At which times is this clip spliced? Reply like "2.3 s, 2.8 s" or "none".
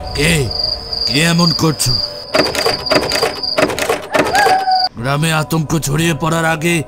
2.1 s, 4.8 s